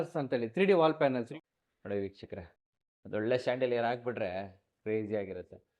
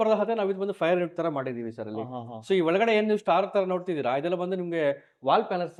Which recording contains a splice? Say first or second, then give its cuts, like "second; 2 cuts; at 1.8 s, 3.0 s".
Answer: first; 1 cut; at 1.3 s